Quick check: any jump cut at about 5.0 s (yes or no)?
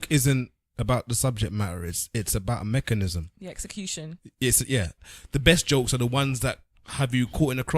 yes